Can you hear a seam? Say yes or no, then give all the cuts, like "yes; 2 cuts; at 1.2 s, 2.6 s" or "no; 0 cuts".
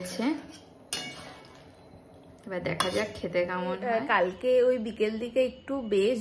yes; 1 cut; at 3.8 s